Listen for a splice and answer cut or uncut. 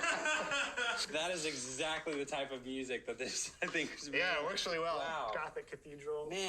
cut